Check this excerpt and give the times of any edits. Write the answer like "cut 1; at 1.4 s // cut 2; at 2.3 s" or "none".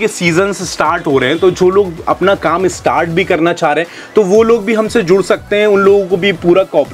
none